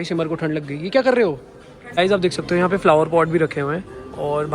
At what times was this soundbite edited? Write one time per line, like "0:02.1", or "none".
0:01.9